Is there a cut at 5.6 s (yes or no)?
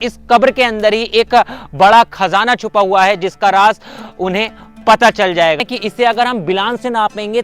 yes